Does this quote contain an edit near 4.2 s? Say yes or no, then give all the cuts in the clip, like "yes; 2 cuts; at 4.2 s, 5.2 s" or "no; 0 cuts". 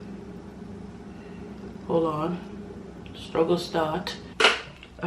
yes; 1 cut; at 4.2 s